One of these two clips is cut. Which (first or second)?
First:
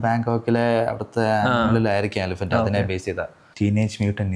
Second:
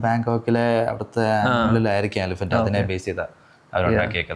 first